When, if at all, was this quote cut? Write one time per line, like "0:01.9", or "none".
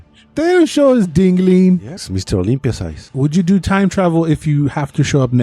0:02.0
0:03.0